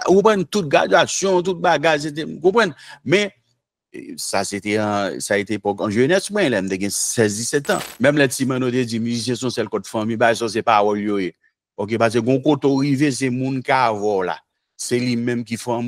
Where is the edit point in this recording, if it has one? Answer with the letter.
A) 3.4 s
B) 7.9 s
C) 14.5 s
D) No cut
B